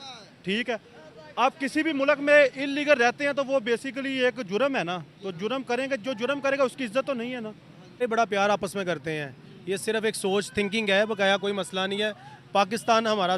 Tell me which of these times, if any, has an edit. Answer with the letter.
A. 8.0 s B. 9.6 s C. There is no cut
A